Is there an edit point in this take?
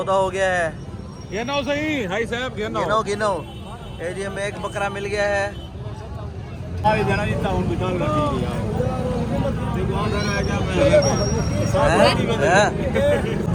no; 0 cuts

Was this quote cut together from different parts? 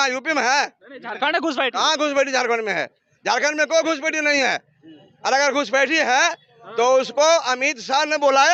no; 0 cuts

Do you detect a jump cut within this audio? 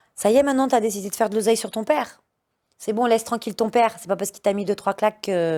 no; 0 cuts

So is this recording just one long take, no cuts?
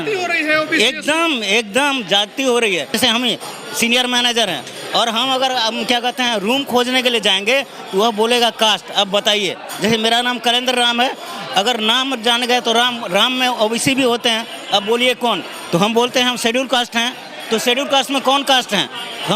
no; 1 cut; at 2.9 s

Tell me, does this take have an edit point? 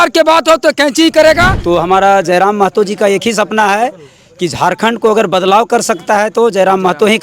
yes; 1 cut; at 1.5 s

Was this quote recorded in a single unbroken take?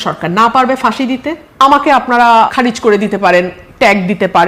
no; 2 cuts; at 1.4 s, 2.5 s

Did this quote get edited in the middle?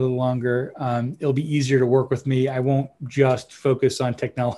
no; 0 cuts

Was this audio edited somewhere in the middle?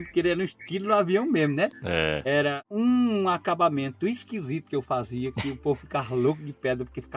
yes; 1 cut; at 2.6 s

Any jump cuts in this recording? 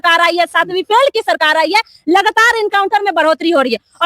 no; 0 cuts

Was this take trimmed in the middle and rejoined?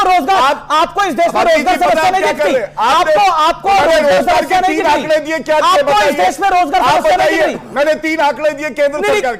no; 0 cuts

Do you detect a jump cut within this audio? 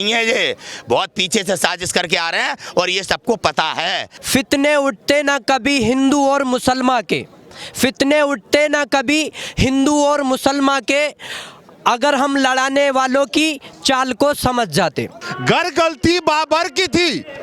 yes; 2 cuts; at 4.1 s, 15.3 s

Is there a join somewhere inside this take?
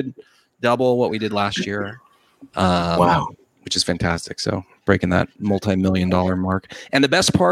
no; 0 cuts

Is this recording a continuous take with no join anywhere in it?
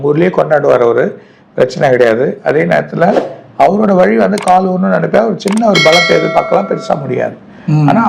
yes; 0 cuts

